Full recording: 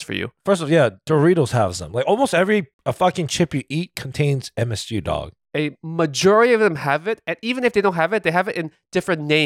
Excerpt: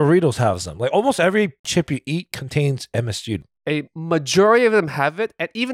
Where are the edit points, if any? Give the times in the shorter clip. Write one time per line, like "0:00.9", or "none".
0:01.7
0:03.4